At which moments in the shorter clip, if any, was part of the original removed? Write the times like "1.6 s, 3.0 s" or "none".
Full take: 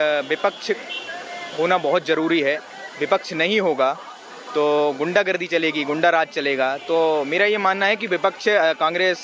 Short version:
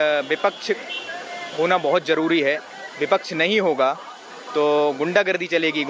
none